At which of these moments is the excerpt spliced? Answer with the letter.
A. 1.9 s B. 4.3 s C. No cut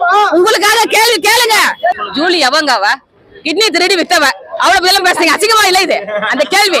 A